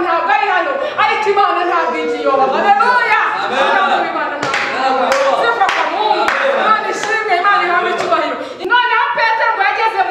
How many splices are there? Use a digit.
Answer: 1